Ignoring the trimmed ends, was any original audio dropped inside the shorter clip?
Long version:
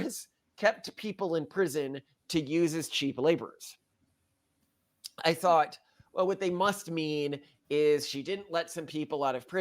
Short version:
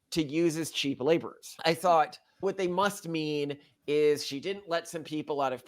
yes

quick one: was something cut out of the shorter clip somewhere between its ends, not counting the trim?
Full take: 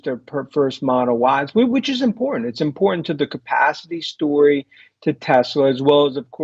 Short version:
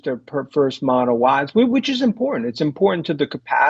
no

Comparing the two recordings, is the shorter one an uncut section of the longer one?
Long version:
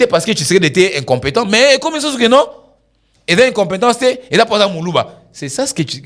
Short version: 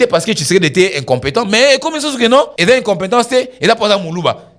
no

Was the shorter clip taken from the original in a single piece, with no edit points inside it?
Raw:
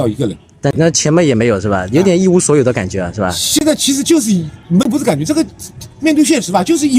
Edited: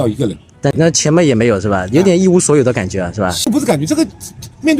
no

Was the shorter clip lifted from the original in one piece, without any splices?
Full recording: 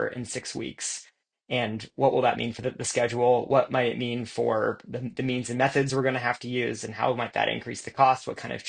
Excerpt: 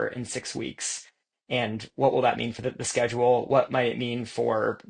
yes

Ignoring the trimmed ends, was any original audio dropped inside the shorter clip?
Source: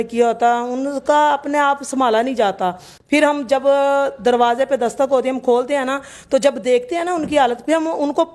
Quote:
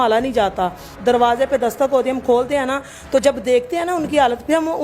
yes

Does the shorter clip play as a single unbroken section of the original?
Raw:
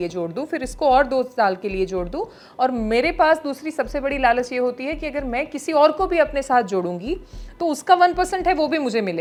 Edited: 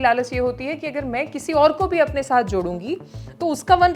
yes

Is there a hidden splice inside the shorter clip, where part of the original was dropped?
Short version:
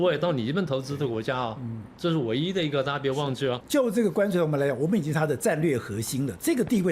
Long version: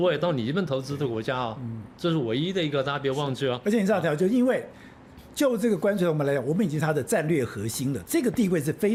yes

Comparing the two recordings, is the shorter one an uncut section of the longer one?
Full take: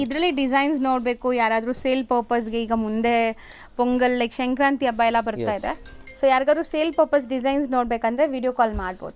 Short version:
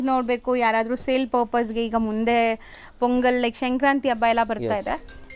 yes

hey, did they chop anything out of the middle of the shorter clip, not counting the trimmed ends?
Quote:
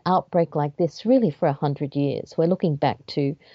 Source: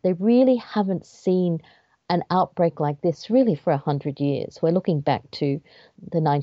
no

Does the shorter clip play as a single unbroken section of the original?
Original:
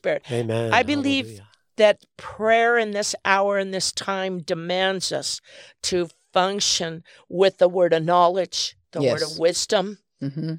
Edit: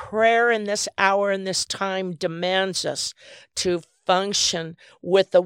yes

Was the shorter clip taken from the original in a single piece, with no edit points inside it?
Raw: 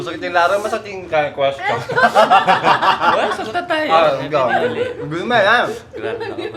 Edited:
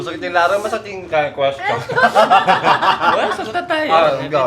yes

